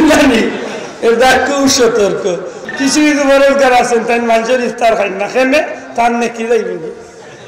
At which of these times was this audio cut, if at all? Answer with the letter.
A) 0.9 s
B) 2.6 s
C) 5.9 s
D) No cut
B